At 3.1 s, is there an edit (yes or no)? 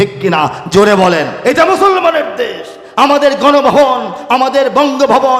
no